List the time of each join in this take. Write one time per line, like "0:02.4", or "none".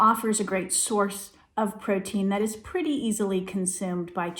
none